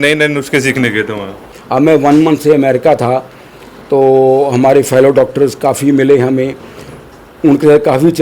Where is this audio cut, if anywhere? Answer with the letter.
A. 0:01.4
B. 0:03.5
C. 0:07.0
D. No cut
A